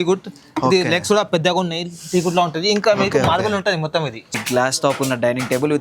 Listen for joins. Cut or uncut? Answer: cut